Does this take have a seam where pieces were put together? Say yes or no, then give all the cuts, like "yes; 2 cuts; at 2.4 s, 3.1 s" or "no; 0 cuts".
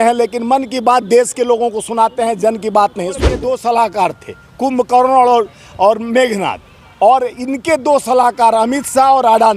yes; 1 cut; at 3.3 s